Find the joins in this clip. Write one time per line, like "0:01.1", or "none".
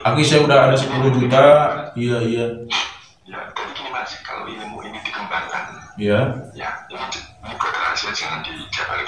none